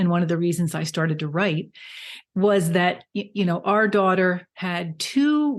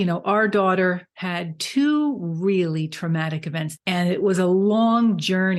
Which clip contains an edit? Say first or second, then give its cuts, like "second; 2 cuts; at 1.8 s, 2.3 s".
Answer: second; 1 cut; at 3.7 s